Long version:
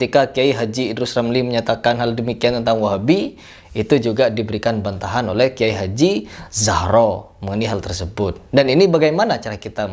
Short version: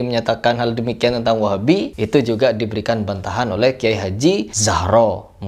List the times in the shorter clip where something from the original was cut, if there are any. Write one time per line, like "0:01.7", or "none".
0:02.0
0:04.5